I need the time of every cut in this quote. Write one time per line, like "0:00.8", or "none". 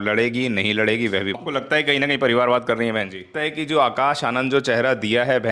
0:01.4
0:03.3